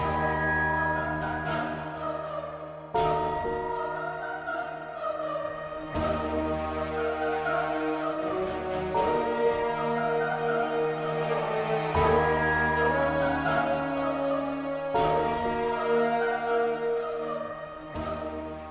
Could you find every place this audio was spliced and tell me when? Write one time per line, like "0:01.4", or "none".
none